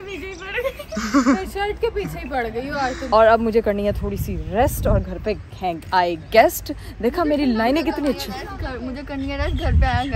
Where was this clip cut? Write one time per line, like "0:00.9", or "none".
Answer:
0:03.0